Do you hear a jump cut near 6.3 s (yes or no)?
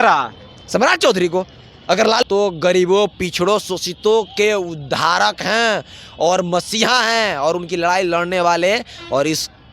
no